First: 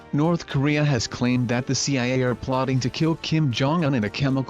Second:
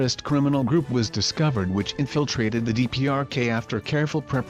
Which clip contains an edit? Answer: first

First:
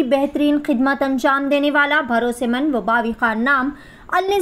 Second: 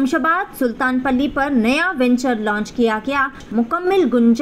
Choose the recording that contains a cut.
second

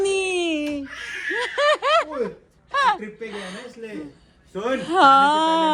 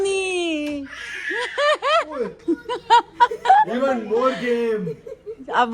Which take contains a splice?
second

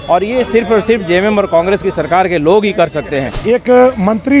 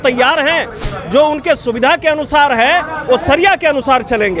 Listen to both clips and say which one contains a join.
first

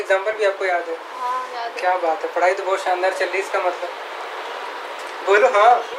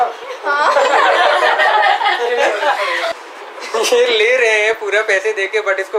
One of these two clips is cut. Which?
second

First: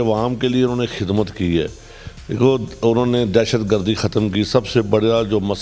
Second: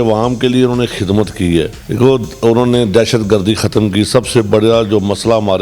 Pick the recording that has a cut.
second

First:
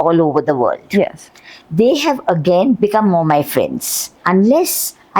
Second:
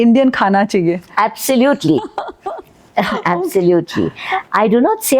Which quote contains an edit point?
first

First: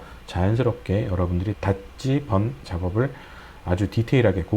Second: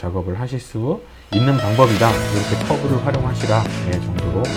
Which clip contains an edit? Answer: first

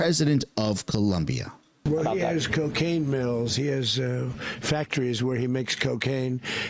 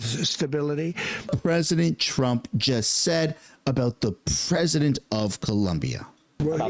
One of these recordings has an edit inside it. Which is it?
second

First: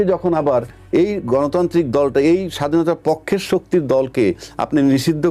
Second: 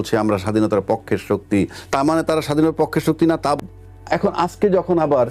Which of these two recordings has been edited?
second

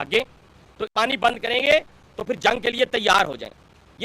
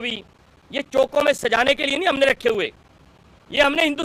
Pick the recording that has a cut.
first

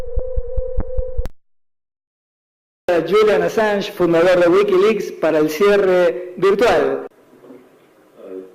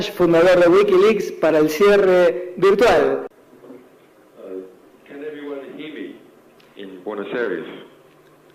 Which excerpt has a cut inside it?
first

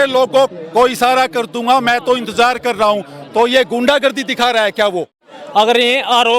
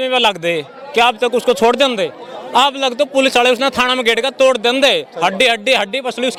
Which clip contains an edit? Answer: first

